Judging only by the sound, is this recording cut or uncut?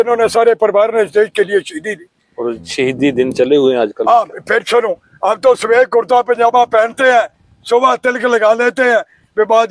uncut